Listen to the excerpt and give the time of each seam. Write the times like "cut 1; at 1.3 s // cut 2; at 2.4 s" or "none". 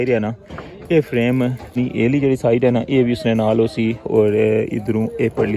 cut 1; at 1.7 s